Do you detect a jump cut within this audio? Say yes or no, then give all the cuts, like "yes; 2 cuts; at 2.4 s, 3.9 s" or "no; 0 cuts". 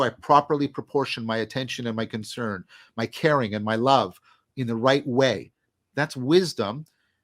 no; 0 cuts